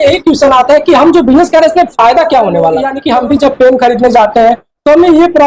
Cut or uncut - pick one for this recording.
cut